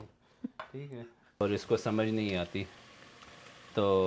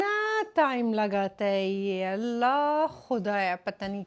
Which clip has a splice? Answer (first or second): first